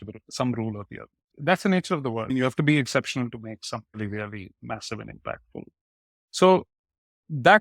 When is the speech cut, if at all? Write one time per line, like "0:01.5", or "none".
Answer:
0:01.3